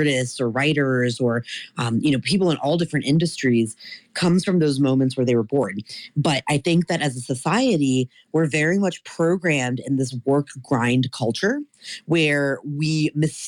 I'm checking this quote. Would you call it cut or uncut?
uncut